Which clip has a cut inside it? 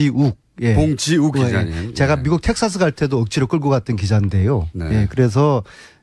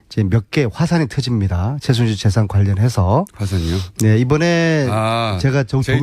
second; 1 cut; at 2.3 s

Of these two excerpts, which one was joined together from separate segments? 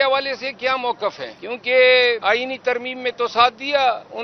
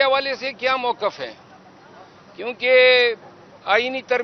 first; 2 cuts; at 1.3 s, 2.2 s

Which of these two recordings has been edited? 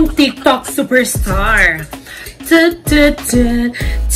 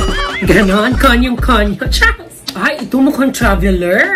second; 1 cut; at 2.5 s

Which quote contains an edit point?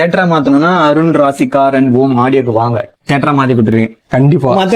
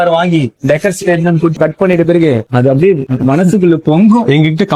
first; 1 cut; at 2.9 s

